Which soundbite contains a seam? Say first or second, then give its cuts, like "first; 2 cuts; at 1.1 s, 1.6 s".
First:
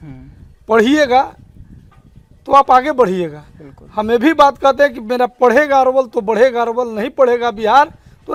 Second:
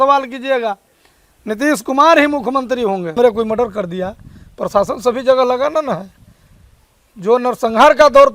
second; 1 cut; at 3.2 s